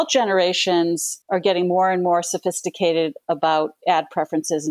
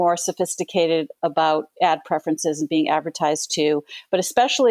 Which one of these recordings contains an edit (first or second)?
first